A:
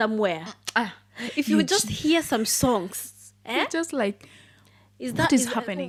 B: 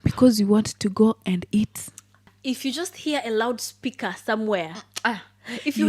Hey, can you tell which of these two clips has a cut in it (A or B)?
B